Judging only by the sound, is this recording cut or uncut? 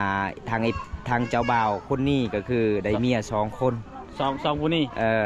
uncut